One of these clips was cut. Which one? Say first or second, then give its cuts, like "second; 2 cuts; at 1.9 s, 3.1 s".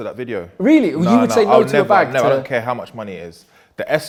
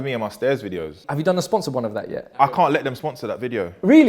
second; 2 cuts; at 1.0 s, 2.3 s